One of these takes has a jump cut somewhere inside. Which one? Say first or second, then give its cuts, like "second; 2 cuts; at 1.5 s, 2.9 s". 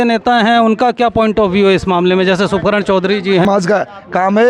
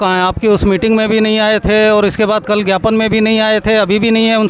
first; 1 cut; at 3.4 s